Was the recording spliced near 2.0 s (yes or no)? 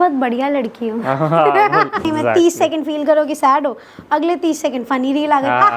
yes